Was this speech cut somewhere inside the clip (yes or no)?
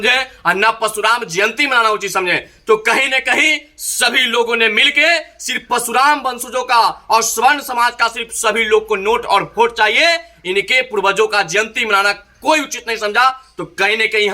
no